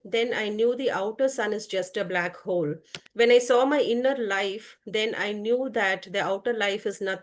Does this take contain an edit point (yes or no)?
no